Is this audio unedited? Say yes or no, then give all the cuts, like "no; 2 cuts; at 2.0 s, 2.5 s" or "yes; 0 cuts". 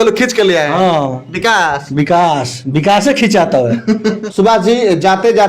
yes; 0 cuts